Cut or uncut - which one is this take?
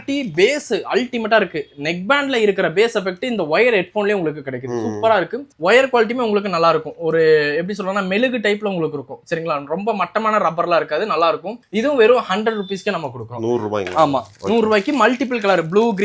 uncut